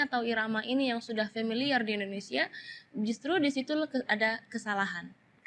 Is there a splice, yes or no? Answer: no